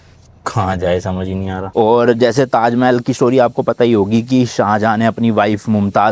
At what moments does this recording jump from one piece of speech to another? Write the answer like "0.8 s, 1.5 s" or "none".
1.6 s